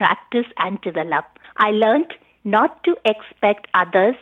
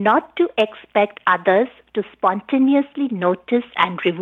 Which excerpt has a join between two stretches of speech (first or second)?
first